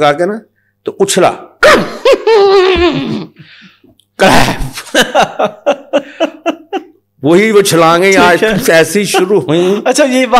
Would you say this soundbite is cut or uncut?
uncut